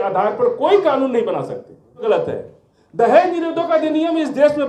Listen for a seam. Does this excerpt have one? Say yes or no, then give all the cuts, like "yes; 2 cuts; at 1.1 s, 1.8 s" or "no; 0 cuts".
yes; 1 cut; at 2.0 s